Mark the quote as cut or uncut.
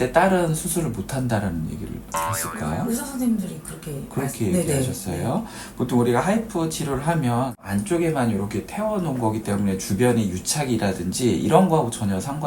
uncut